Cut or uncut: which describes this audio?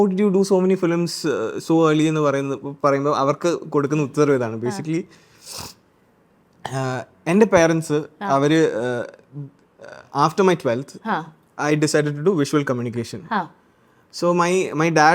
uncut